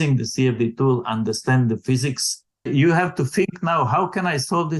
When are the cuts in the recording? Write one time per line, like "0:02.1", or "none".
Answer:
0:02.7